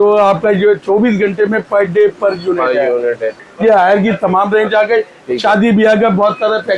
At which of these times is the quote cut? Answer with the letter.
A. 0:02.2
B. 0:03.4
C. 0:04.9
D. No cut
B